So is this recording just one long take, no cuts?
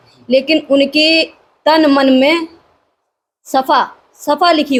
yes; 0 cuts

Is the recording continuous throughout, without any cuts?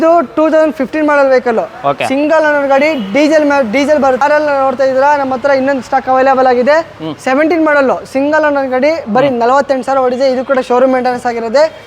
no; 1 cut; at 4.2 s

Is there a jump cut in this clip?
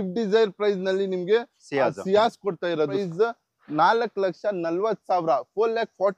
yes; 1 cut; at 2.9 s

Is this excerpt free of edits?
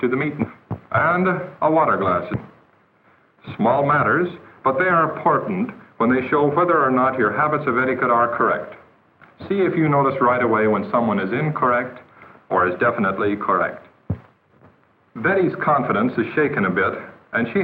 no; 1 cut; at 8.7 s

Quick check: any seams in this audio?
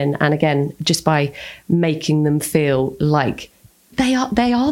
no; 0 cuts

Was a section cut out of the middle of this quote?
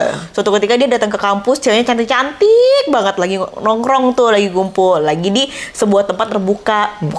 no; 0 cuts

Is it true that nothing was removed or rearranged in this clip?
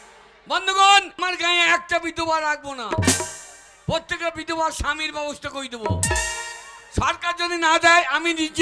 no; 1 cut; at 1.2 s

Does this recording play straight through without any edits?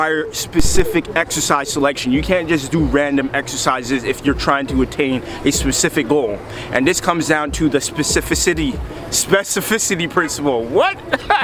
yes; 0 cuts

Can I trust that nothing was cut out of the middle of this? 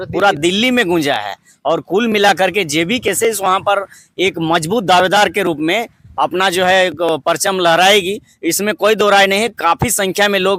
yes; 0 cuts

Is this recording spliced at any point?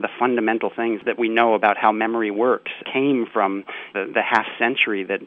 yes; 2 cuts; at 1.0 s, 2.8 s

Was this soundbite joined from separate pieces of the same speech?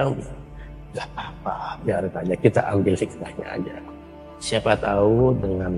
no; 0 cuts

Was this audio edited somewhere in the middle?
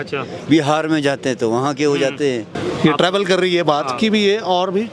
yes; 1 cut; at 2.5 s

